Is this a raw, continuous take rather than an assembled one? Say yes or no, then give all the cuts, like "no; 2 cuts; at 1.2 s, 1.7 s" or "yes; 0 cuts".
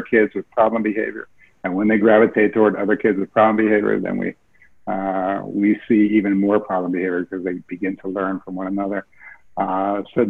yes; 0 cuts